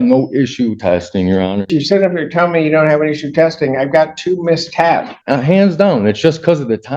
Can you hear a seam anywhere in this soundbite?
yes; 2 cuts; at 1.7 s, 5.2 s

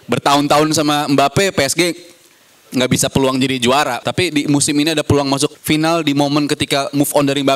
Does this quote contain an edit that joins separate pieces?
yes; 2 cuts; at 4.0 s, 5.6 s

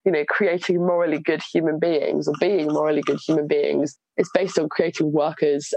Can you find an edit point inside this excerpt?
no; 0 cuts

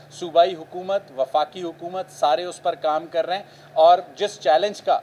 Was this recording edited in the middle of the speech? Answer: no; 0 cuts

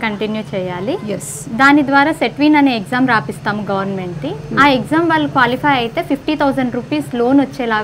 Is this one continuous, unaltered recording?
yes; 0 cuts

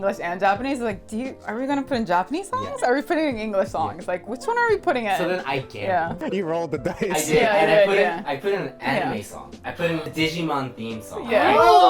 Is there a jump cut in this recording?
yes; 2 cuts; at 6.3 s, 10.1 s

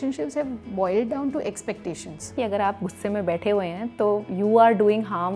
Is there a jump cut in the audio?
yes; 1 cut; at 2.3 s

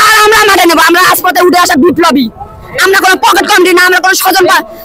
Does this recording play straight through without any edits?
yes; 0 cuts

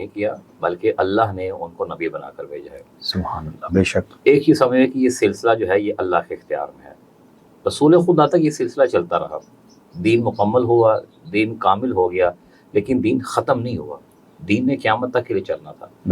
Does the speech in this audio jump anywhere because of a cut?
no; 0 cuts

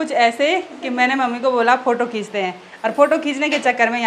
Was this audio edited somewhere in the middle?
no; 0 cuts

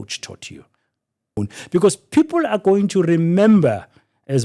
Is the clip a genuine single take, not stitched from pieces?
no; 1 cut; at 1.4 s

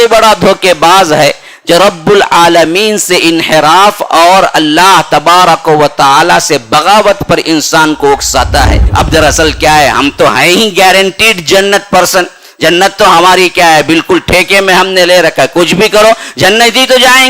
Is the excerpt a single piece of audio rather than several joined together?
no; 1 cut; at 8.8 s

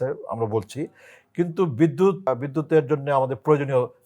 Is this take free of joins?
no; 1 cut; at 2.3 s

